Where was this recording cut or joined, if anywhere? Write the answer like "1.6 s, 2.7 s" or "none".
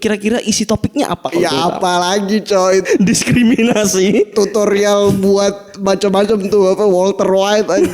2.9 s